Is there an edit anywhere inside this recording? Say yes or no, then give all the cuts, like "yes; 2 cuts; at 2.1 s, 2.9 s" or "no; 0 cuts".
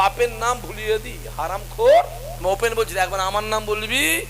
yes; 1 cut; at 2.2 s